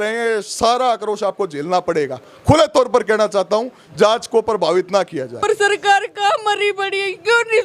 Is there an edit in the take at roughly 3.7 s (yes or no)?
no